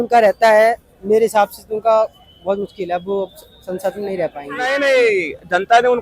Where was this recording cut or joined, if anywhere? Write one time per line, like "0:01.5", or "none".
0:04.5